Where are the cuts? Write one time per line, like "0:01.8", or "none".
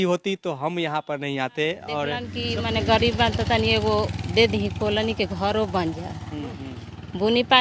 0:02.3